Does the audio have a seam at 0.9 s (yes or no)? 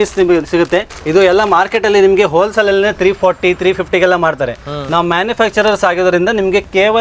yes